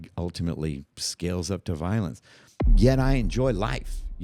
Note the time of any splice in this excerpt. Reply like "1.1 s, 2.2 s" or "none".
2.5 s